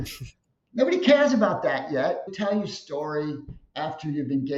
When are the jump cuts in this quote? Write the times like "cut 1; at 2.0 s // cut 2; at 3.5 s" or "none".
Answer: cut 1; at 2.3 s